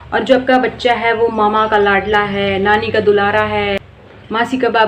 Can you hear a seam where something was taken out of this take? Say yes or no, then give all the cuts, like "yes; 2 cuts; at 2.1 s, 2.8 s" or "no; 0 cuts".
no; 0 cuts